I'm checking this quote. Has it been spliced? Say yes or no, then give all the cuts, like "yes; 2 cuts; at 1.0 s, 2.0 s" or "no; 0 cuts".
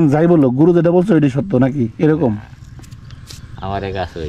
no; 0 cuts